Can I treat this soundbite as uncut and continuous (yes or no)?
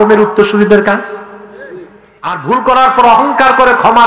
no